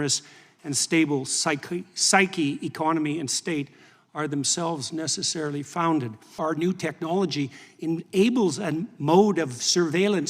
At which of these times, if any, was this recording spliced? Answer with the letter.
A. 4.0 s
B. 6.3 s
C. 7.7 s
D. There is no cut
B